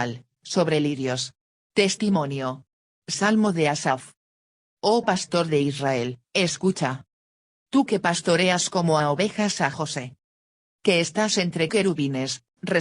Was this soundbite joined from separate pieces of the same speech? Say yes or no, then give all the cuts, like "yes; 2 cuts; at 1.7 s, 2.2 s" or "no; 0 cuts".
yes; 2 cuts; at 4.4 s, 6.2 s